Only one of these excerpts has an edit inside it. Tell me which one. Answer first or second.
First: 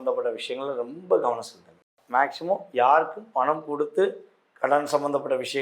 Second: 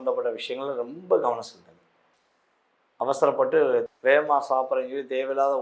first